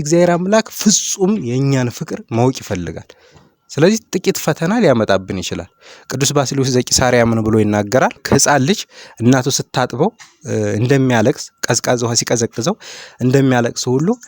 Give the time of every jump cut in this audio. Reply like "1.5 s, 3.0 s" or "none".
8.2 s